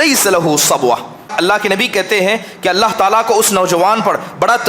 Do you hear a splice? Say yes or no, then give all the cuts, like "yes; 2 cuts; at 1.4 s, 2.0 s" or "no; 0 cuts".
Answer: yes; 1 cut; at 1.3 s